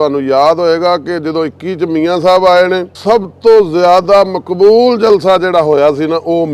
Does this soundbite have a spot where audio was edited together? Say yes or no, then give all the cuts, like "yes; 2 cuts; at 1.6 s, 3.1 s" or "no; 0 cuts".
yes; 1 cut; at 2.9 s